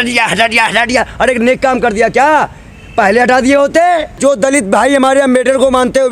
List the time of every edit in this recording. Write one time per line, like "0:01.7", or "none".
0:04.1